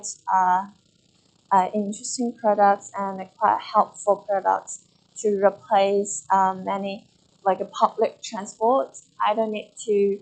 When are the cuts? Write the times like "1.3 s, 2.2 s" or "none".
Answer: none